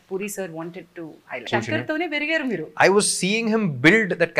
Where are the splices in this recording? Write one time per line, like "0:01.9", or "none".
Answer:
0:01.5